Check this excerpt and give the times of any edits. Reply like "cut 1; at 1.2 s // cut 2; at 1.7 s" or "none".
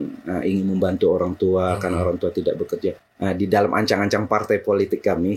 cut 1; at 3.1 s